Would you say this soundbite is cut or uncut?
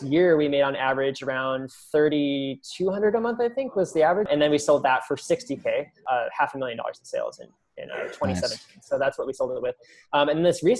cut